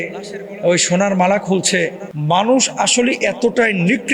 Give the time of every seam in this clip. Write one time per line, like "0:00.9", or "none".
0:02.1